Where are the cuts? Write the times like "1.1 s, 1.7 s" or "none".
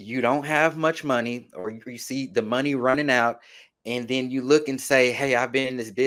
none